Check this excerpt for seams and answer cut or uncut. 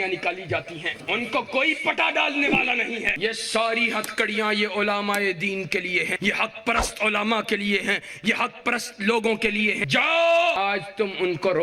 cut